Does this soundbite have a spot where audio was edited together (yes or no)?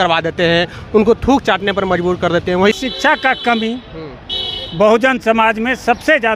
yes